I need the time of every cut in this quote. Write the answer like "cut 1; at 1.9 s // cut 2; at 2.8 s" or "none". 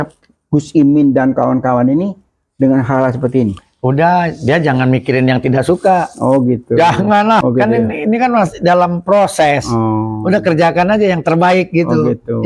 cut 1; at 7.4 s